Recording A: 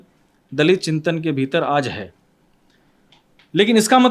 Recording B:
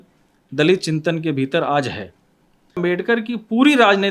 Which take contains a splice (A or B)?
B